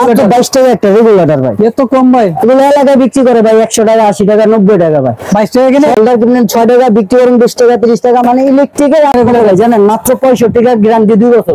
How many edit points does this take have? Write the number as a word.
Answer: two